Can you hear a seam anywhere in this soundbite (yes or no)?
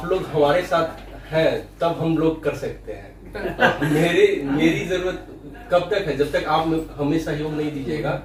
no